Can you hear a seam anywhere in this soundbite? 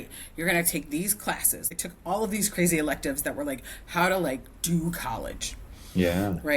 yes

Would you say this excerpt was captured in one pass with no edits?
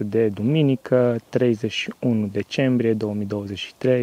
yes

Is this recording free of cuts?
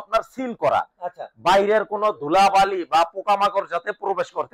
yes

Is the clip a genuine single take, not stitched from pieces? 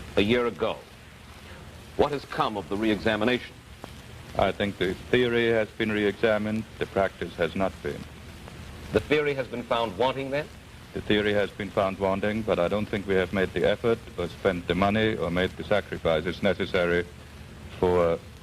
no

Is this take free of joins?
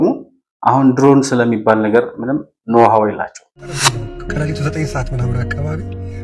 no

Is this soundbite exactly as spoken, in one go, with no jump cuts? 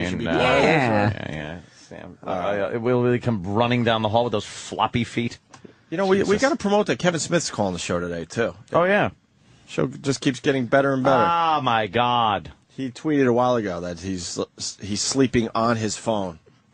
yes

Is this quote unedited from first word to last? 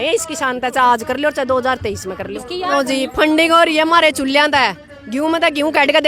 no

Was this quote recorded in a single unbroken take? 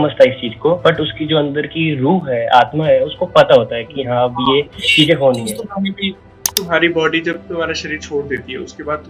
no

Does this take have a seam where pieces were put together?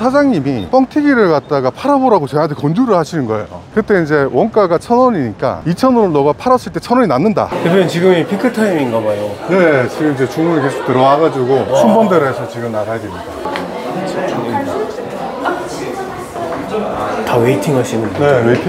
yes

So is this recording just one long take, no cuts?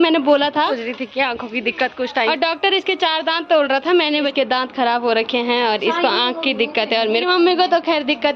no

